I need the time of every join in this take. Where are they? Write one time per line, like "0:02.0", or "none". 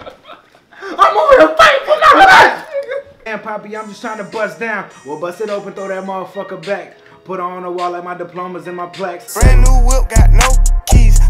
0:03.3
0:09.2